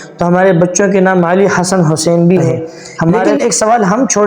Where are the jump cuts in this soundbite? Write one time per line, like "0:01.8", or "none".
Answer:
0:03.2